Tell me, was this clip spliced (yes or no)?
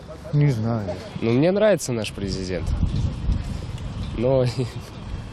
yes